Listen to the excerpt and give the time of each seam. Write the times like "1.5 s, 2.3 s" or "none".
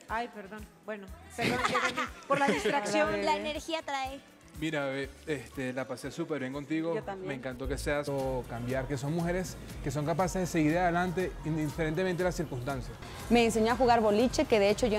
none

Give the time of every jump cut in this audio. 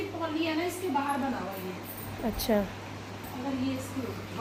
none

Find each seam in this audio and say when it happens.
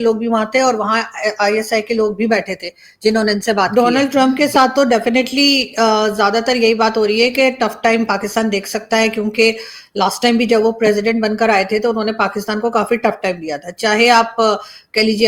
3.7 s

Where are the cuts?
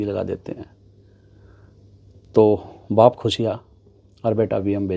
none

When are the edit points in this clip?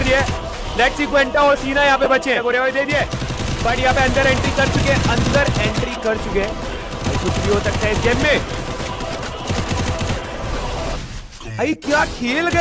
2.4 s

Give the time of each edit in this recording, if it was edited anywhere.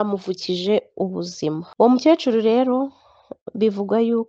1.7 s

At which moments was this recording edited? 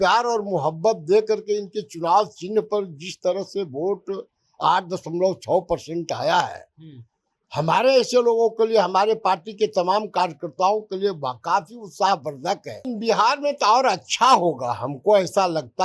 12.9 s

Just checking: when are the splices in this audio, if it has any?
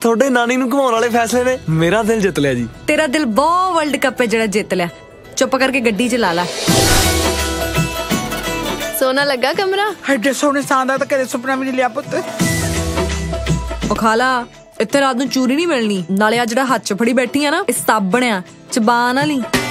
none

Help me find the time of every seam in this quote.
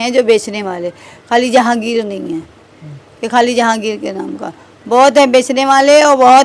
none

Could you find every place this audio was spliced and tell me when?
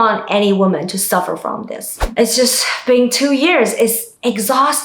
2.0 s

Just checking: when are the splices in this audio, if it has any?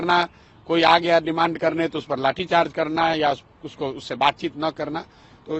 none

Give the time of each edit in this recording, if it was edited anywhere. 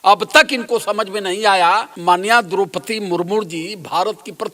1.9 s

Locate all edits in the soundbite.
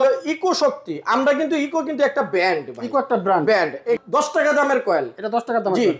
4.0 s

